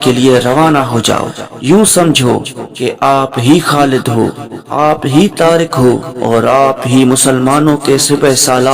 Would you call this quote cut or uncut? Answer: uncut